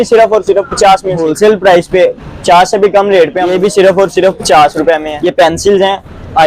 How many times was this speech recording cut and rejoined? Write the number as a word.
three